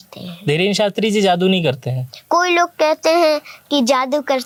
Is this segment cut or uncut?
uncut